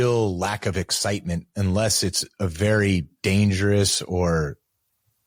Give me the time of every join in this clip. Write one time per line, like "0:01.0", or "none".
none